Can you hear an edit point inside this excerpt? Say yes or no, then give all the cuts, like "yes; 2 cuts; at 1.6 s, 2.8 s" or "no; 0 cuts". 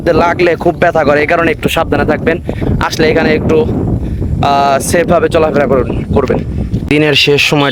no; 0 cuts